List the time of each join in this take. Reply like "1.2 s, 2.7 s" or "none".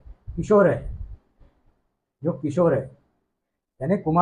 none